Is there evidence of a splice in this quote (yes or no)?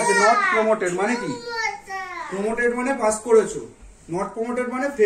no